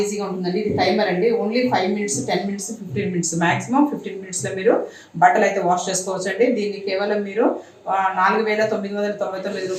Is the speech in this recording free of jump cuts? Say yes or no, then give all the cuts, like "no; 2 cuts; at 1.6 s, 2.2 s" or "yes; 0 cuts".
yes; 0 cuts